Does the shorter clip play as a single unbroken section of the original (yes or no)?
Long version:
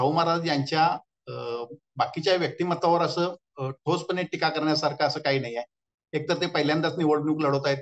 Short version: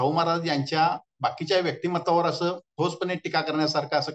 no